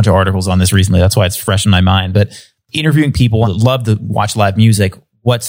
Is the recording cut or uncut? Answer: cut